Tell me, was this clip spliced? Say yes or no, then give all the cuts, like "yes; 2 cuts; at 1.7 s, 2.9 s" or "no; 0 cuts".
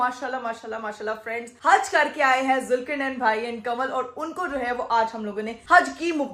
no; 0 cuts